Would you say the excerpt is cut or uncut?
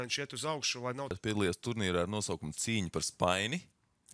cut